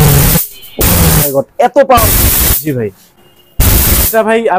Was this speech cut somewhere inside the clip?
no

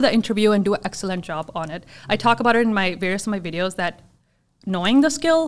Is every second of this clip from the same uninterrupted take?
yes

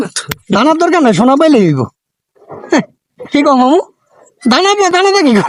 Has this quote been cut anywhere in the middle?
no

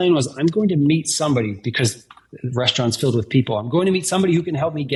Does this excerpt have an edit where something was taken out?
no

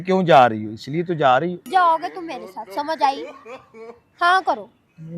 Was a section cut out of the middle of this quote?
yes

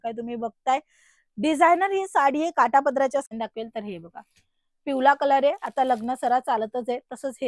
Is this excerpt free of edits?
no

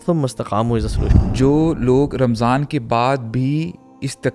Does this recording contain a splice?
yes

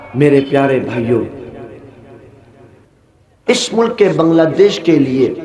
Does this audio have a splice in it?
yes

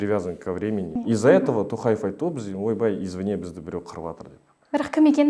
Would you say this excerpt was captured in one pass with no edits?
no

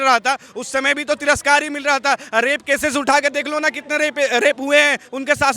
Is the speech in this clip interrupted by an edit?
no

